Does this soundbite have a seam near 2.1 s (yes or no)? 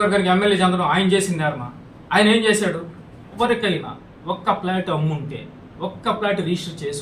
no